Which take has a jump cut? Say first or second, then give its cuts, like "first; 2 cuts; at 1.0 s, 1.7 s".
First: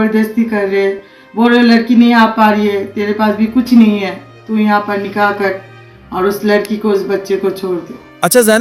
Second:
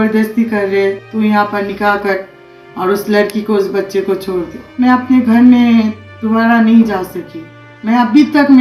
second; 2 cuts; at 1.0 s, 4.6 s